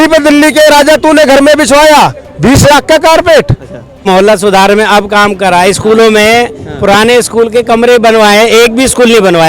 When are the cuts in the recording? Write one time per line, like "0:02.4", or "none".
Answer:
0:04.0